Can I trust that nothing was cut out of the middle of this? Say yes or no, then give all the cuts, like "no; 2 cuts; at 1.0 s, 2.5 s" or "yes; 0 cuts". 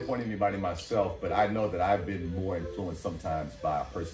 yes; 0 cuts